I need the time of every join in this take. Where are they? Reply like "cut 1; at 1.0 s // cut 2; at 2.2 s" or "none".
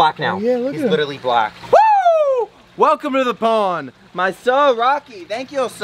none